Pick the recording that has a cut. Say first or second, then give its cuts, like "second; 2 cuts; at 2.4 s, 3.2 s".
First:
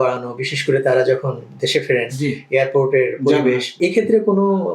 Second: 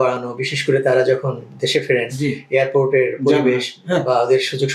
first; 1 cut; at 3.7 s